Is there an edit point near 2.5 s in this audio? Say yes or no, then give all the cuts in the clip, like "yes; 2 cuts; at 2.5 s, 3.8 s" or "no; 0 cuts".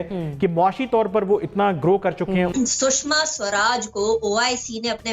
yes; 1 cut; at 2.5 s